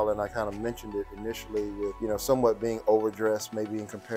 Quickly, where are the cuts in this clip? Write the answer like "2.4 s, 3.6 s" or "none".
2.0 s

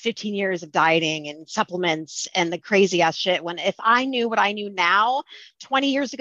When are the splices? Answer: none

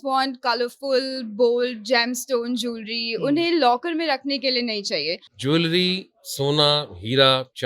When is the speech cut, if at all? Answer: 5.3 s

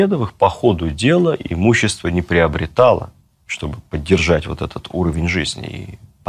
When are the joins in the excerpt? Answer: none

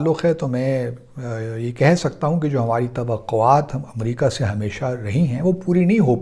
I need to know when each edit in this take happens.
none

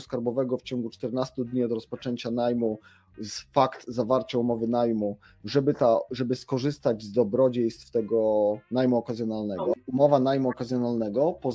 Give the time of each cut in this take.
9.7 s

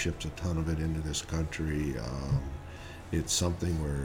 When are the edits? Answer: none

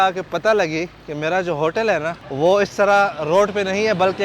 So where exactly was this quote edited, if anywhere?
2.2 s

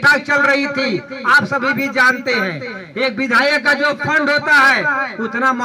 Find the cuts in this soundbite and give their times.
none

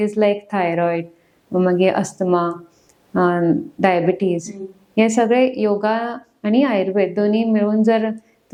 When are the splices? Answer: none

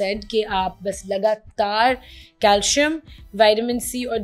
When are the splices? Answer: none

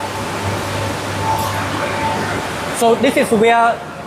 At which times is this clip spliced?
2.4 s

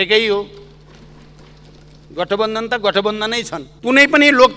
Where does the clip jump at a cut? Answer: 3.6 s

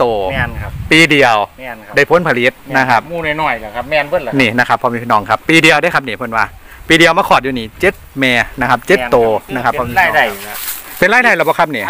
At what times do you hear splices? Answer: 9.8 s

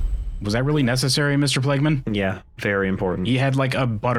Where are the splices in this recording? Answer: none

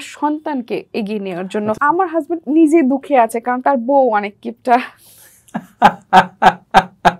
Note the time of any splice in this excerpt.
1.8 s

